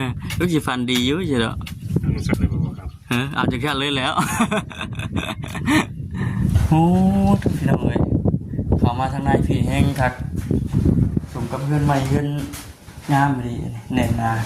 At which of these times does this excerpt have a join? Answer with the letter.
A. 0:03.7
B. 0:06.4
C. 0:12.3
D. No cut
B